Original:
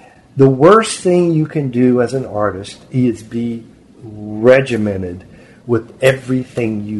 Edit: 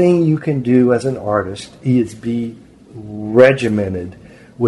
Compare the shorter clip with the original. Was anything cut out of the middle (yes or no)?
no